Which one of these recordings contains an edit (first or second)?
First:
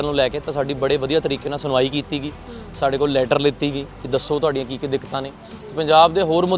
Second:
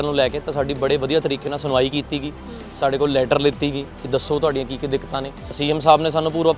second